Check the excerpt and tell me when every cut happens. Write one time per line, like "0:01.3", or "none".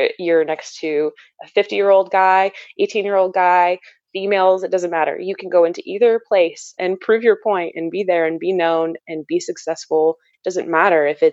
0:06.8
0:10.3

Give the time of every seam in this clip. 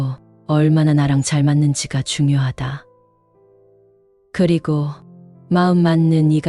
0:02.8
0:04.3

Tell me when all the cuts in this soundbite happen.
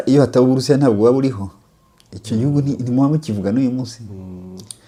none

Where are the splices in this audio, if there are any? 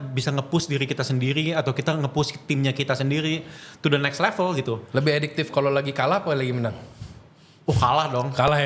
none

